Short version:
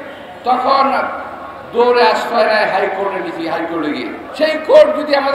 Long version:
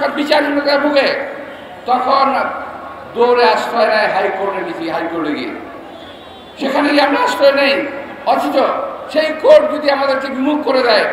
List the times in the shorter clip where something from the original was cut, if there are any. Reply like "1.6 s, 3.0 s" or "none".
4.2 s